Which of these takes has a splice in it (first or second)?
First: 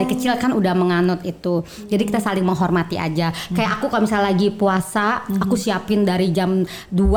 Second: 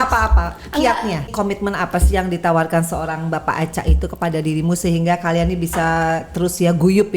second